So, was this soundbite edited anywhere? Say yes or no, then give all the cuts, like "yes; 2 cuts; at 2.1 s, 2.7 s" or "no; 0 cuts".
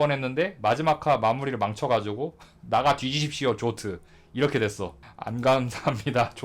yes; 1 cut; at 5.0 s